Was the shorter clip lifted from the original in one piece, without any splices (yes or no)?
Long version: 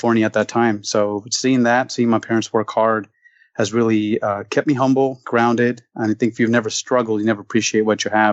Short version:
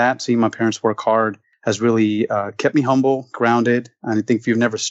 no